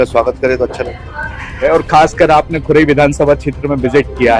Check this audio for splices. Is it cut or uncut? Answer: cut